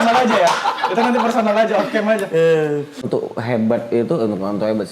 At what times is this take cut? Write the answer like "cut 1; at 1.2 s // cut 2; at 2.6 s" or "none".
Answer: cut 1; at 3.1 s